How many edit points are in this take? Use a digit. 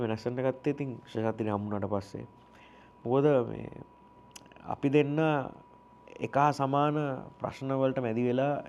0